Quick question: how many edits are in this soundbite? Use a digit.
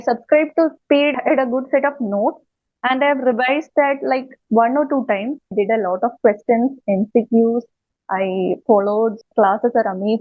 3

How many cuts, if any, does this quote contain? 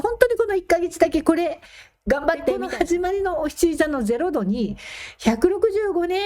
1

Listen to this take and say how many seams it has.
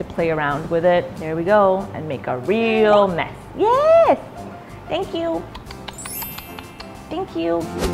0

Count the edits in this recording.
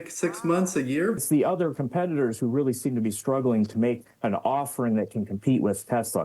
1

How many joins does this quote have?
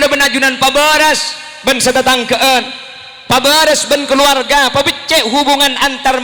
0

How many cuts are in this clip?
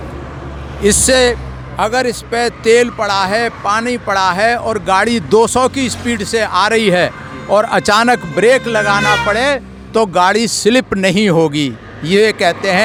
0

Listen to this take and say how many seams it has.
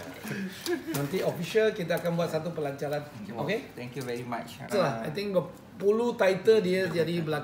1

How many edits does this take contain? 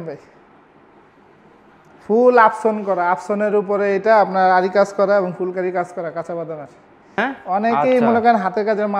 1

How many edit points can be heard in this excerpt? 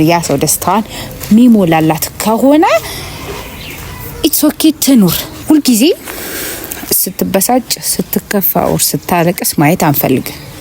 1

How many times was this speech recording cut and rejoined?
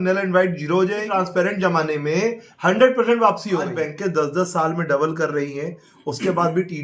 2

